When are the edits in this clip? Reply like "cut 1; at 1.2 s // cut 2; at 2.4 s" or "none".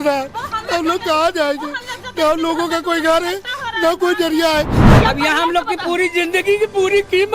cut 1; at 4.8 s

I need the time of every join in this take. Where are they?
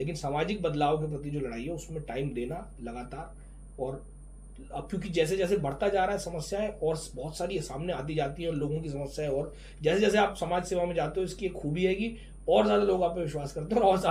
none

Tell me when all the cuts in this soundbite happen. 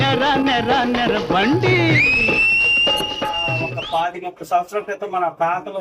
cut 1; at 3.7 s

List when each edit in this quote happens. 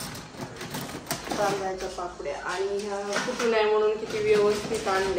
none

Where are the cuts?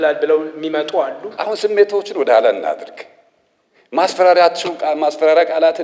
cut 1; at 1.3 s

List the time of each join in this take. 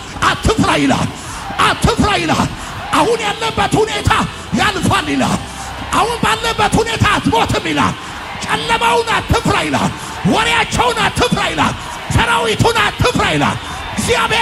none

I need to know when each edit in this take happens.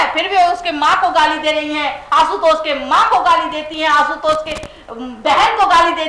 none

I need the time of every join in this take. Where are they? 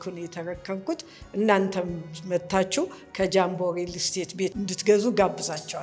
cut 1; at 4.5 s

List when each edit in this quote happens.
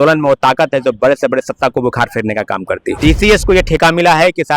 cut 1; at 3.0 s

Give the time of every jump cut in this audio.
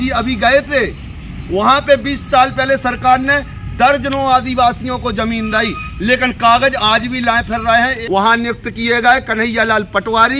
cut 1; at 8.0 s

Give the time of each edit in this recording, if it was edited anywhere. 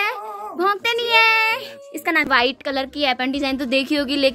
cut 1; at 2.3 s

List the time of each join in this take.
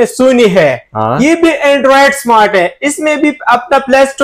none

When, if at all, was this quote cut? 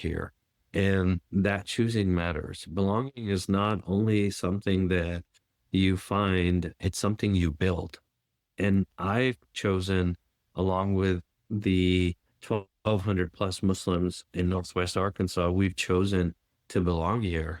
none

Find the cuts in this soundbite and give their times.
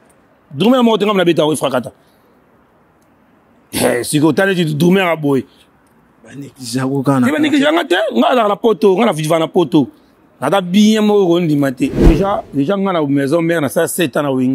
cut 1; at 12.0 s

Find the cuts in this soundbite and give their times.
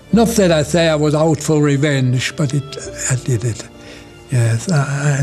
cut 1; at 1.2 s

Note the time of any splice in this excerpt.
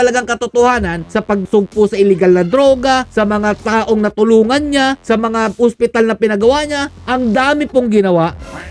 cut 1; at 1.4 s // cut 2; at 3.1 s // cut 3; at 5.0 s // cut 4; at 6.9 s

